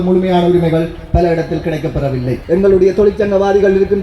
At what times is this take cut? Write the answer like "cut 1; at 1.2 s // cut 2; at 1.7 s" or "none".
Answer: cut 1; at 2.4 s